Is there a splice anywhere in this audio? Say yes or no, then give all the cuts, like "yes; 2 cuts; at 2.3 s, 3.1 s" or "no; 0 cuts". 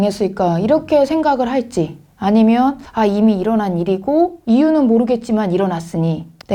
no; 0 cuts